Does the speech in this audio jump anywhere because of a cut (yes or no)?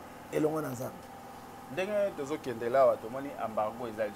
no